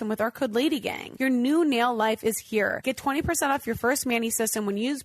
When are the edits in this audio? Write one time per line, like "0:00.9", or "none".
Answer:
0:01.0
0:02.8